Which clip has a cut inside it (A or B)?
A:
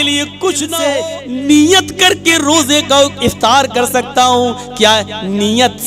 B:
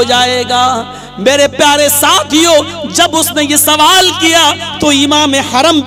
A